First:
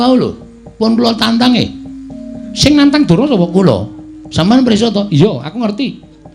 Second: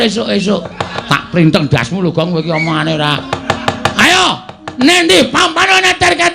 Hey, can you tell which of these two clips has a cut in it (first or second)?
second